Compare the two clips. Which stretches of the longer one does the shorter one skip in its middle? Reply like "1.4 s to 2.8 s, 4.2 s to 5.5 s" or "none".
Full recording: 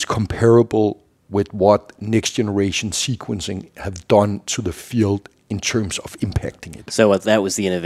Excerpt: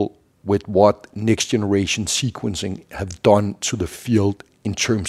none

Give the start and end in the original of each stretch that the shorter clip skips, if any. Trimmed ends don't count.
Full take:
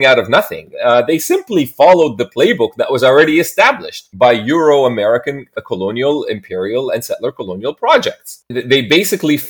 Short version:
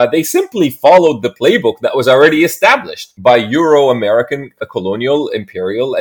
none

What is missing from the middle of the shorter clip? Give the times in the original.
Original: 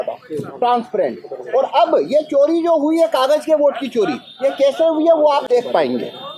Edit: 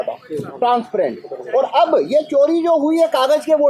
none

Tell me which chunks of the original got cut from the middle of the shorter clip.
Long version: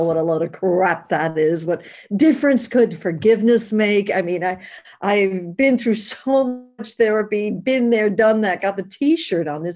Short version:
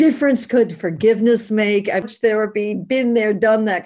4.3 s to 6.8 s

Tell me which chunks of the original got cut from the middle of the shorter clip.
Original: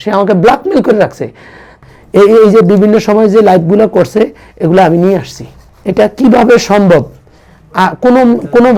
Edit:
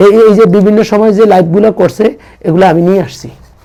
none

